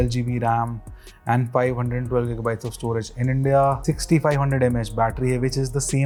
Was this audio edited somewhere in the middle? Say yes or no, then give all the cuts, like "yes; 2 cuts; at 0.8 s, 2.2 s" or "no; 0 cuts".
no; 0 cuts